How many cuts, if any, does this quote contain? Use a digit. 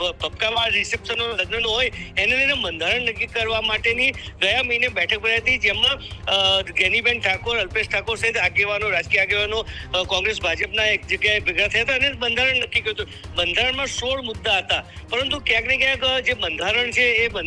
0